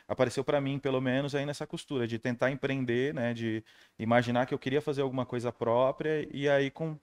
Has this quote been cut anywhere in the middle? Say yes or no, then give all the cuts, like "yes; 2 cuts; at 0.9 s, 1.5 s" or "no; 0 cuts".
no; 0 cuts